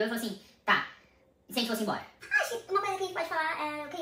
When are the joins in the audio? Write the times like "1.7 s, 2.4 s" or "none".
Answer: 2.1 s